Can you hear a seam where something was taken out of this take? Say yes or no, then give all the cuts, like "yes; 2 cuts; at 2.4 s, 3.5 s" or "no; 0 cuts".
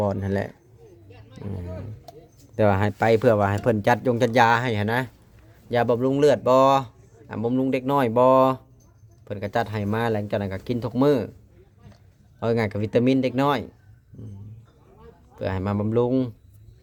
no; 0 cuts